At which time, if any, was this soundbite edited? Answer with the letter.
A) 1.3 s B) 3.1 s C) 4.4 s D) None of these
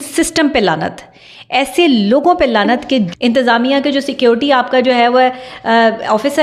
B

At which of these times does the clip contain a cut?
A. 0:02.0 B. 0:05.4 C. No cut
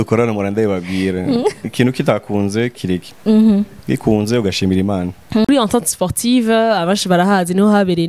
B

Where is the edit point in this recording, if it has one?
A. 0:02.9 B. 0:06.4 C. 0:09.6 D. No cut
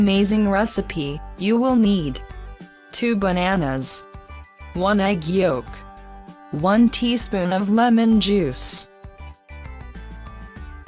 A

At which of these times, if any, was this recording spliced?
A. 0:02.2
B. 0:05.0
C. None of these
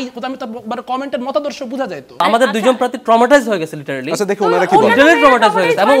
A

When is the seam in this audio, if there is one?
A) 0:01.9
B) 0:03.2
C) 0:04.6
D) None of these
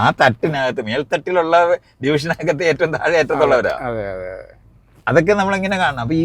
D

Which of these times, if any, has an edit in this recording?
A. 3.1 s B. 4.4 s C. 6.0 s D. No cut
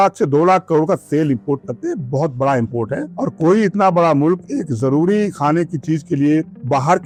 D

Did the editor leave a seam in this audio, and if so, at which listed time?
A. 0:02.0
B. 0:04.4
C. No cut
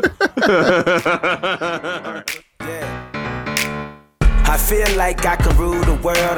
A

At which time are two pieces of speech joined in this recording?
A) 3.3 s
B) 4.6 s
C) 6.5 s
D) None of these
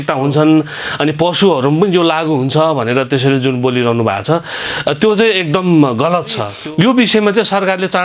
C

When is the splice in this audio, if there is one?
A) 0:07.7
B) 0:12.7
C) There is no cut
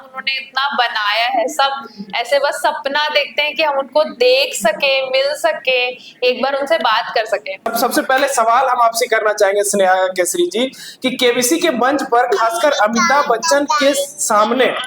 A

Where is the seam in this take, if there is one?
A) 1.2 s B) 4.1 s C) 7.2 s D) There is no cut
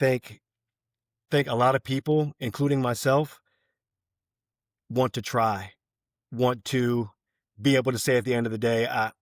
A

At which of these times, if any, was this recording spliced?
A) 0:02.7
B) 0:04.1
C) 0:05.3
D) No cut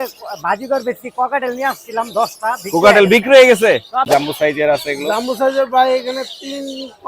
B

